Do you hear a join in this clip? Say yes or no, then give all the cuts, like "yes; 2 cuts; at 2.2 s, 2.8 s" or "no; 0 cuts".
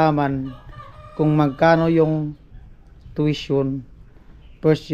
no; 0 cuts